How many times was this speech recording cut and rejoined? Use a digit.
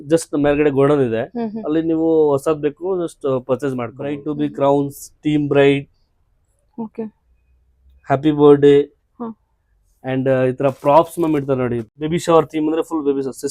2